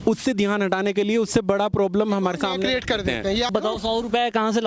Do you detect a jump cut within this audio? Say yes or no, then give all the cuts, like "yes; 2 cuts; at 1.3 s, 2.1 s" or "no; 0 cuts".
yes; 1 cut; at 3.5 s